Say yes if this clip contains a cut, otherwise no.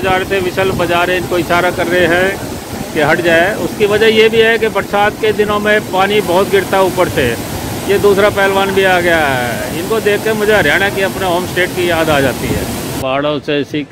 yes